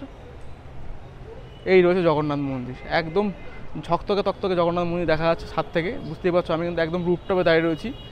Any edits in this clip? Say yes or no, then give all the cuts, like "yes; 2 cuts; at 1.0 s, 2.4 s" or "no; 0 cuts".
no; 0 cuts